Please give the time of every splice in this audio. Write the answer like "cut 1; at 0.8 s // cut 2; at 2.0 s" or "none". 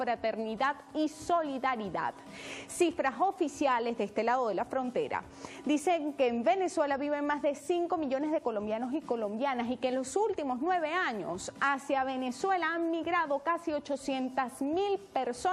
cut 1; at 4.9 s

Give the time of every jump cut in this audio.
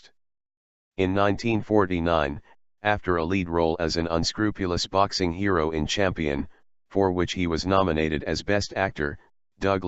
none

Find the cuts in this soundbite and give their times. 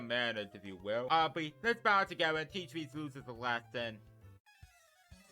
cut 1; at 1.1 s

